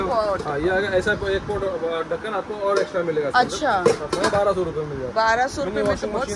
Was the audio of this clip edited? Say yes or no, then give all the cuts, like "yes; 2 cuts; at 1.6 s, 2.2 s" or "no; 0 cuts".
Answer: no; 0 cuts